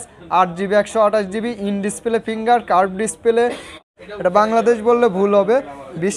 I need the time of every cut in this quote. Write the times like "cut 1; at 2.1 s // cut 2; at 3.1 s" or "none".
cut 1; at 3.8 s